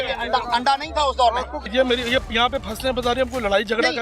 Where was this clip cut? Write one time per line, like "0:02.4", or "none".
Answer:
0:01.6